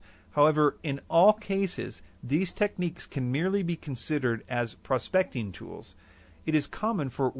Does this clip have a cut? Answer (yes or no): no